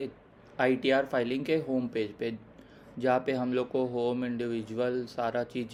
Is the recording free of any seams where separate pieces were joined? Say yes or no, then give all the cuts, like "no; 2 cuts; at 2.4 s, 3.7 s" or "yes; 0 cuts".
yes; 0 cuts